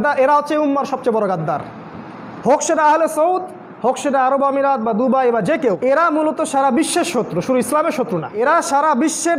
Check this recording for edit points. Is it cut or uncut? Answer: cut